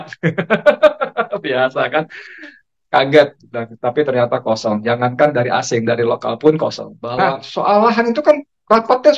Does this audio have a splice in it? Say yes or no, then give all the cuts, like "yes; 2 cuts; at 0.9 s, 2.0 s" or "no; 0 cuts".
yes; 1 cut; at 7.5 s